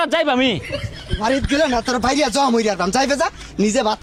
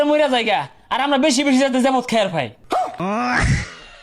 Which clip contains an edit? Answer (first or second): second